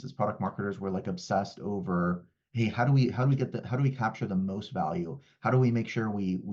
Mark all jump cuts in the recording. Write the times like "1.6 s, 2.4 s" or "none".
none